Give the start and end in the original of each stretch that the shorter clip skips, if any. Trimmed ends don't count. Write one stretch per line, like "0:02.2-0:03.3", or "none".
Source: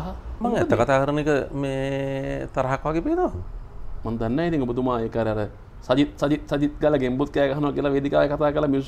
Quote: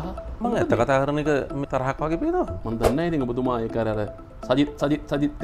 0:01.7-0:02.5
0:03.4-0:04.0